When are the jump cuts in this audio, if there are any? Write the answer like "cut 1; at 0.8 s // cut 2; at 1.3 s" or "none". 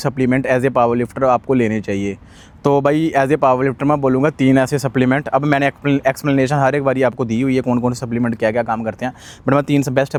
none